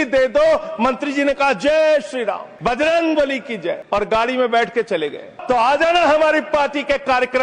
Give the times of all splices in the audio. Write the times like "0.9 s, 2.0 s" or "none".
2.5 s, 3.8 s, 5.3 s